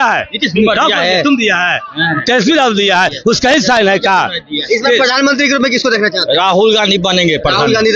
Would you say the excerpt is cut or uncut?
uncut